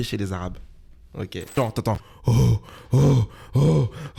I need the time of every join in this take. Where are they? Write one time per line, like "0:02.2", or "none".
0:01.5